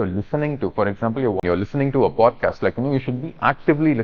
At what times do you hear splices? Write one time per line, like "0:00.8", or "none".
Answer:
0:01.4